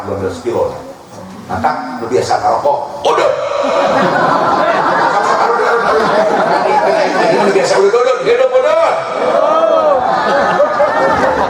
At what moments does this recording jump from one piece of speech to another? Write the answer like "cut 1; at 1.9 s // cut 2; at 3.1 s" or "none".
none